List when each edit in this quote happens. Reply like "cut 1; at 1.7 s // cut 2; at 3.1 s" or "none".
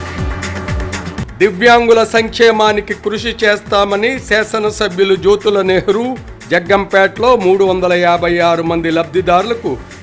cut 1; at 1.1 s